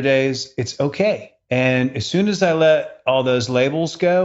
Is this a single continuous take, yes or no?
no